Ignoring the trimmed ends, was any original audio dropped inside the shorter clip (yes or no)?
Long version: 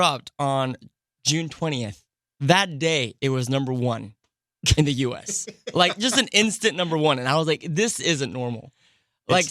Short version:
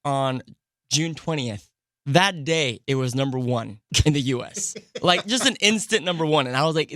yes